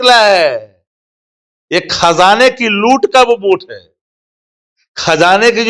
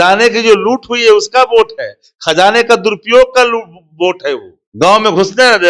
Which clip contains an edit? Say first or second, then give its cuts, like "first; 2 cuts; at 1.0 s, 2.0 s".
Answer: second; 1 cut; at 4.6 s